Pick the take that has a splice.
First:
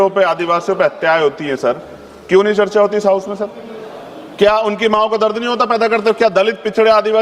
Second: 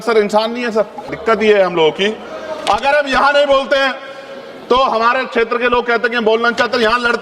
second; 1 cut; at 1.1 s

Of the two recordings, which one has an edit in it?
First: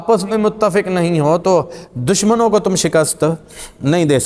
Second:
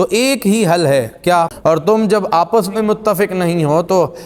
second; 1 cut; at 1.5 s

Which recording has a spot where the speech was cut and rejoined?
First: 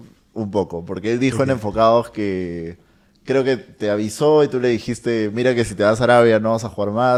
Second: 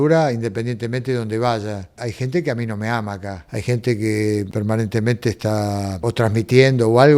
second; 4 cuts; at 2.0 s, 3.4 s, 4.5 s, 6.0 s

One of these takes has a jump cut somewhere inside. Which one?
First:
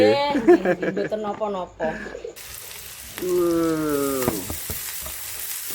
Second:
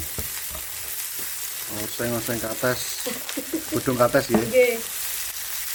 first; 1 cut; at 2.4 s

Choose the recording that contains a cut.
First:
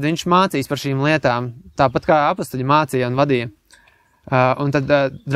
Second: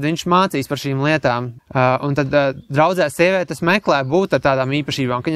second; 1 cut; at 1.6 s

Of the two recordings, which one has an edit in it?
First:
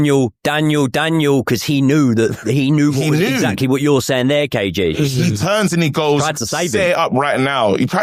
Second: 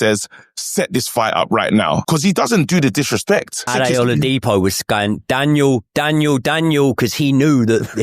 second; 2 cuts; at 2.0 s, 3.7 s

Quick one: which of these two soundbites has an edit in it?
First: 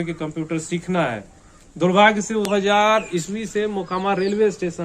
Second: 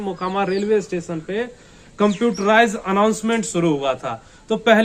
first; 1 cut; at 2.5 s

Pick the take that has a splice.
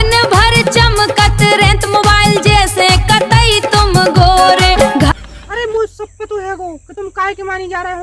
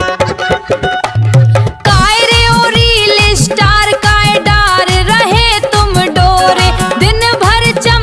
first; 1 cut; at 5.1 s

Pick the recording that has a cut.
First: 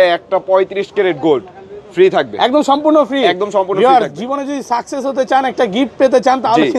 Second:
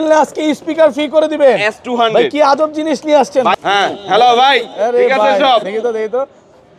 second; 1 cut; at 3.5 s

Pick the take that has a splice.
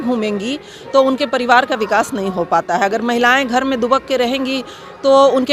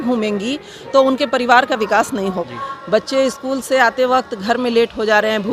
second; 1 cut; at 2.4 s

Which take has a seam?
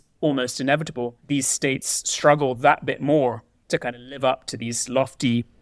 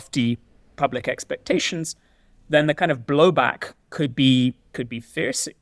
first; 1 cut; at 1.2 s

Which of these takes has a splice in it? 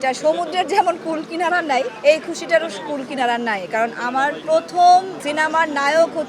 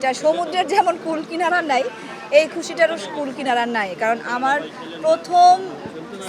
first; 3 cuts; at 1.9 s, 4.4 s, 5.2 s

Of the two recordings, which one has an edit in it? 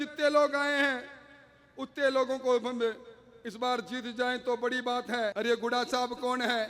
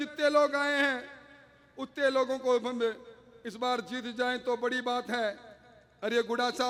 first; 1 cut; at 5.3 s

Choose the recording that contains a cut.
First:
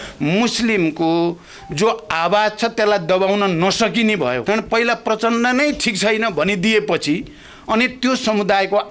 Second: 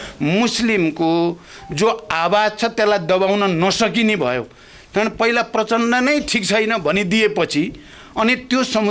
first; 1 cut; at 4.4 s

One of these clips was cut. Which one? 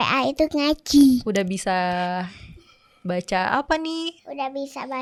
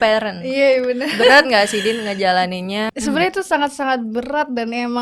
second; 1 cut; at 2.9 s

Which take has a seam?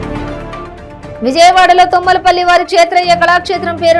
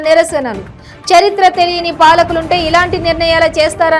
first; 1 cut; at 1.2 s

